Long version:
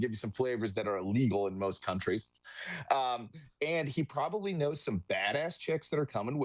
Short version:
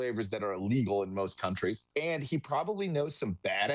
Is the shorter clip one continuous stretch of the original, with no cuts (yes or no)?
no